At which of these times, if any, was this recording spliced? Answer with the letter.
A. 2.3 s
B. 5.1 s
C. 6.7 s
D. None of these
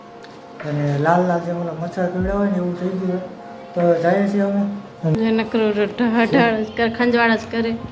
B